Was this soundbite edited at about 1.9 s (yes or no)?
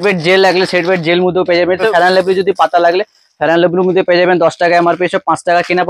yes